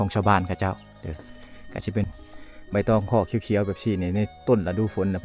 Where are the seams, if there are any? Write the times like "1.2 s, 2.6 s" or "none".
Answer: 2.1 s